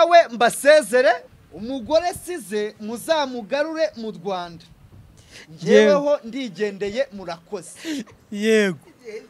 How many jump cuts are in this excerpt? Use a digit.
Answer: 1